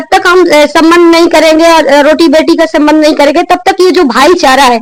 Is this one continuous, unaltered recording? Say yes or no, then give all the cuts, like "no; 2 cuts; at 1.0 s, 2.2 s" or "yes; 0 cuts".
yes; 0 cuts